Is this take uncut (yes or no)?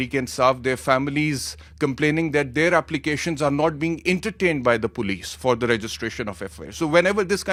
yes